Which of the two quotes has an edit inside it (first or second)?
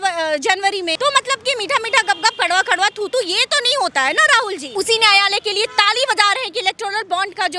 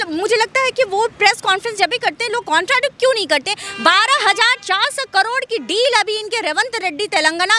first